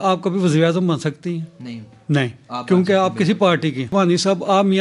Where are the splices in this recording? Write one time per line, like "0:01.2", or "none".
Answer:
0:03.9